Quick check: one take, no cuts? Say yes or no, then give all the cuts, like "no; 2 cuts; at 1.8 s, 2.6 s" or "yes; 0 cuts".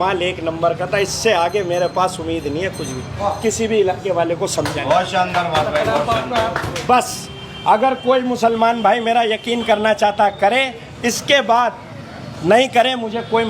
yes; 0 cuts